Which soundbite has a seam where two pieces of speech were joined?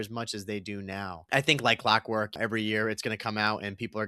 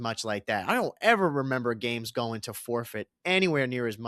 first; 2 cuts; at 1.1 s, 2.3 s

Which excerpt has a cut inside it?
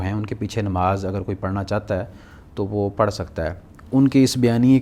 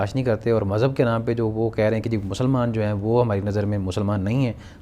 first; 1 cut; at 3.8 s

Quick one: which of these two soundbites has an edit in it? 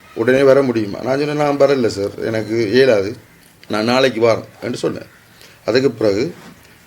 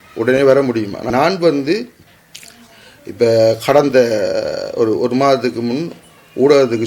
second; 1 cut; at 1.0 s

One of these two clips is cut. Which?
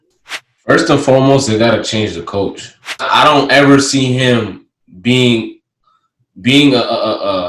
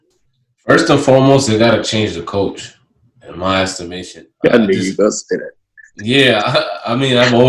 first; 1 cut; at 3.1 s

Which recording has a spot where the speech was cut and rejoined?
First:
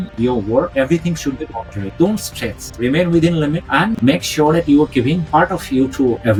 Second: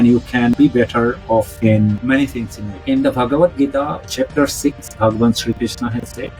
second; 2 cuts; at 2.8 s, 4.0 s

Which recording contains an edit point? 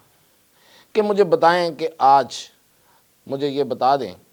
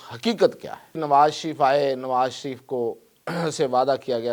second; 1 cut; at 1.0 s

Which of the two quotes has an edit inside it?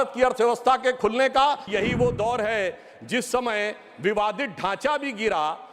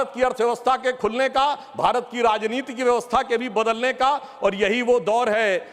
first; 1 cut; at 1.7 s

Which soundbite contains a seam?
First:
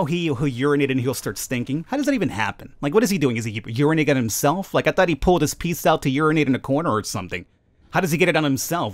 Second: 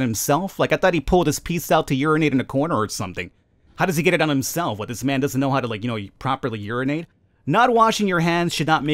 second; 1 cut; at 7.2 s

